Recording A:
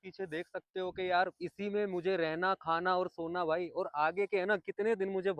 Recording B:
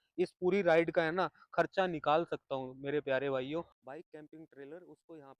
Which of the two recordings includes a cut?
B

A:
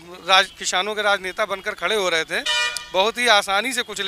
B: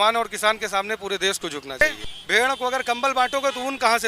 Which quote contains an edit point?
B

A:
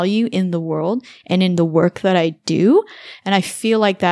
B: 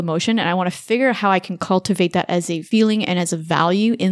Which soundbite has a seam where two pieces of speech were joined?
B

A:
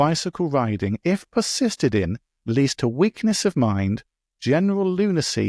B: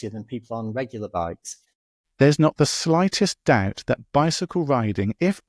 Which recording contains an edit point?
B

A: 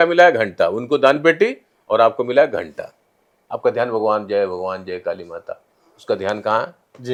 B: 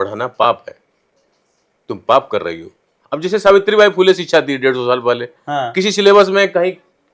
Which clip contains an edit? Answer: B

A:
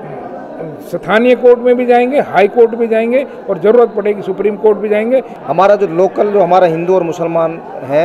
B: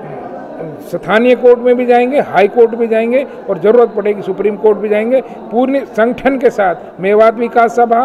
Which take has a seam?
A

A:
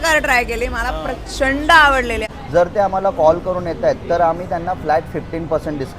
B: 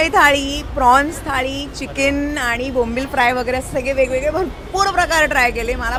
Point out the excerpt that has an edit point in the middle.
A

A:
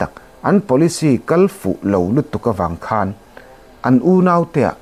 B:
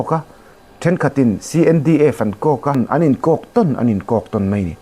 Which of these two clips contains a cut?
B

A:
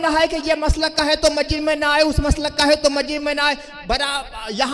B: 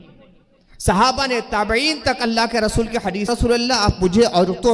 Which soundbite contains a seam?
B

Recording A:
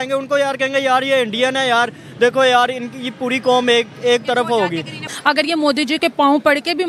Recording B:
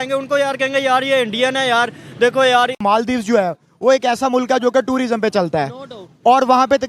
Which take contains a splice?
B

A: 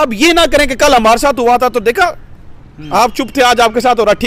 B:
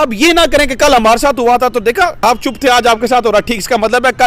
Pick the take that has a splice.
B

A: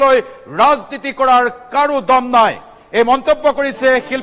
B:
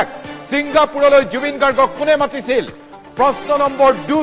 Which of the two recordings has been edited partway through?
B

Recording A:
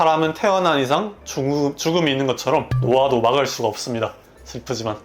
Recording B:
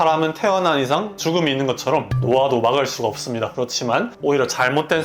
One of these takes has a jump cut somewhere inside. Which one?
B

